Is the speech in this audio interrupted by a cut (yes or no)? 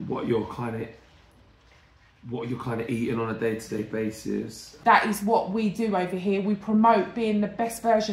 yes